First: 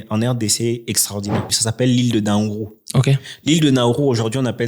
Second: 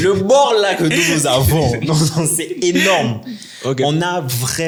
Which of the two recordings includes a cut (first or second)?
first